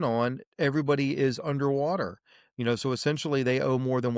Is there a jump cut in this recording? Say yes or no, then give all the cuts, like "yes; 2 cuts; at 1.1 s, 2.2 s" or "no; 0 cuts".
no; 0 cuts